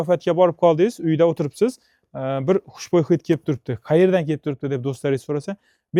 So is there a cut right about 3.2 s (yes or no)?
no